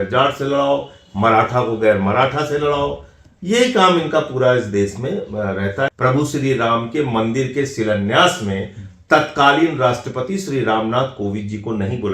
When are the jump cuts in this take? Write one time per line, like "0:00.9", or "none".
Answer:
0:05.9